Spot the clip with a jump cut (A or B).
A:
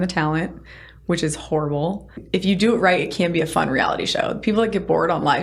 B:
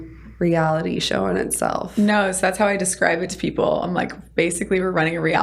A